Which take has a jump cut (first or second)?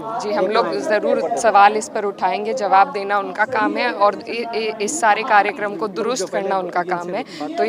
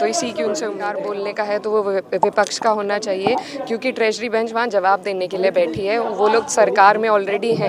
second